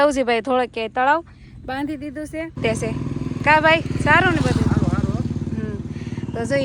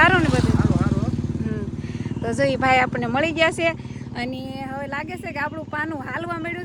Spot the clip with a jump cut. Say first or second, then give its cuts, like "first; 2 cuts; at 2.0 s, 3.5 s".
first; 1 cut; at 2.6 s